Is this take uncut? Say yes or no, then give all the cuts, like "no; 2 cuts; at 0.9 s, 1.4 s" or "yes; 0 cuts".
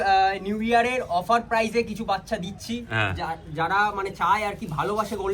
yes; 0 cuts